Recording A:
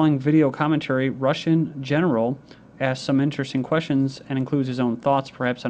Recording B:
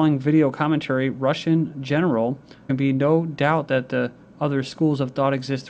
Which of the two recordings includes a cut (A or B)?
A